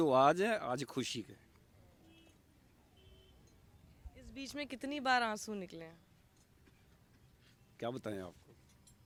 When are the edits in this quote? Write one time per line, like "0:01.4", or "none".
none